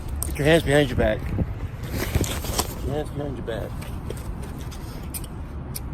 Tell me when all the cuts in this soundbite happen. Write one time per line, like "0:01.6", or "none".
none